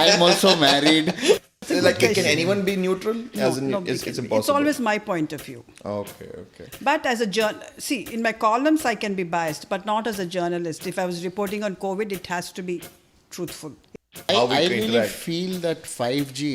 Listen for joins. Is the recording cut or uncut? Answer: cut